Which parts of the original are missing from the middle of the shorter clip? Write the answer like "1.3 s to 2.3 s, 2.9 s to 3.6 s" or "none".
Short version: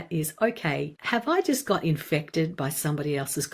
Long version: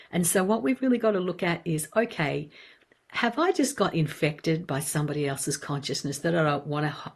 2.5 s to 3.1 s

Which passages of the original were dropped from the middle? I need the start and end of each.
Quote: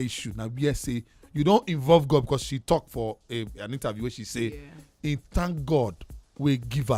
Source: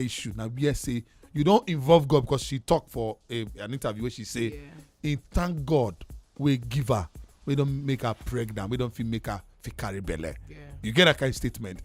none

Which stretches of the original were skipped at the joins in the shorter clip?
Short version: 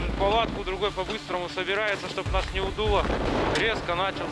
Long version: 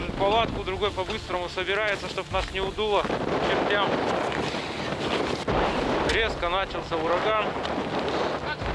3.2 s to 5.8 s

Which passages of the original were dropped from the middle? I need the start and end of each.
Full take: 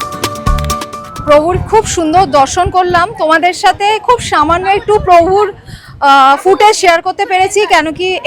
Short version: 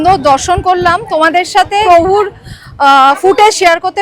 3.9 s to 5.1 s

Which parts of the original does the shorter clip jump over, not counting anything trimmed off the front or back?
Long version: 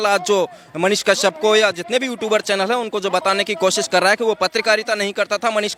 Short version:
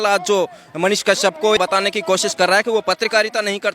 1.6 s to 3.1 s

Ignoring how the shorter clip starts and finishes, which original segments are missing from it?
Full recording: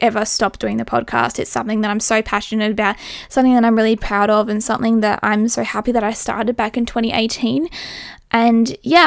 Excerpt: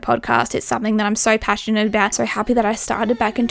3.1 s to 5.6 s

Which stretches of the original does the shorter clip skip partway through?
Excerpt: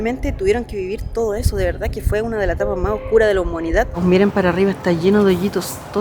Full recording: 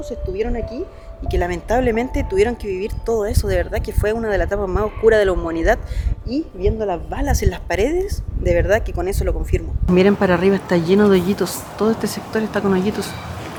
5.8 s to 9.8 s

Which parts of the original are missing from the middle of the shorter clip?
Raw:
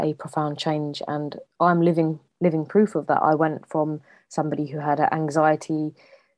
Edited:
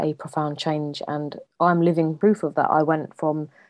2.1 s to 2.6 s

